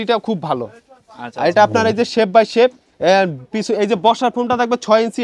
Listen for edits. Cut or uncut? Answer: uncut